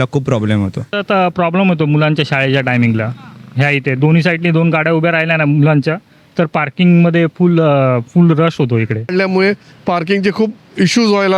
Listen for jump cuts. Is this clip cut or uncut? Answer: cut